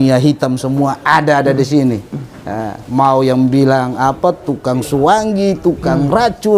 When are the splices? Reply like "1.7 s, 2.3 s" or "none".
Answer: none